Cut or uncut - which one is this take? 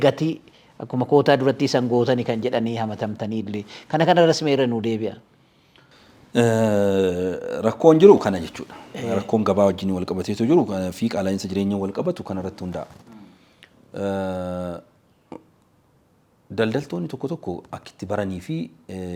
uncut